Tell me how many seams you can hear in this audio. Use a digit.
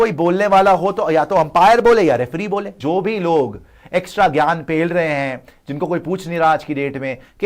1